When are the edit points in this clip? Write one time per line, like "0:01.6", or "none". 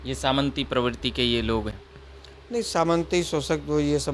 0:01.7